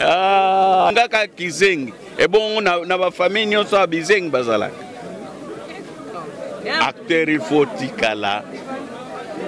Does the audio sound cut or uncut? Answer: cut